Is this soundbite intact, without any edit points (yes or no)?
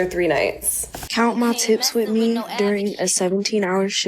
no